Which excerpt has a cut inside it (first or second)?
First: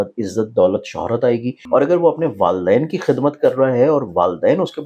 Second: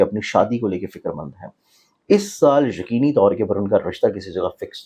first